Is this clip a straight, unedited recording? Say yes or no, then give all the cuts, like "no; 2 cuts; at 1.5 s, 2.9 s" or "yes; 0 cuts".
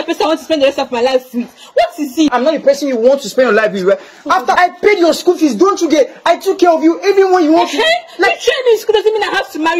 no; 2 cuts; at 2.3 s, 4.5 s